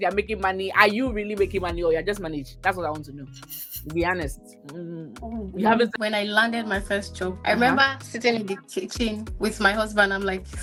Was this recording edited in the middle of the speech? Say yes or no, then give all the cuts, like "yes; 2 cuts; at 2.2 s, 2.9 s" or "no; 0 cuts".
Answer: no; 0 cuts